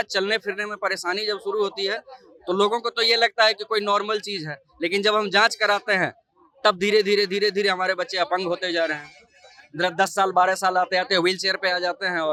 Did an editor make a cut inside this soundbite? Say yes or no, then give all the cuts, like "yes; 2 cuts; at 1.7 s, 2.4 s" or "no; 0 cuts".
no; 0 cuts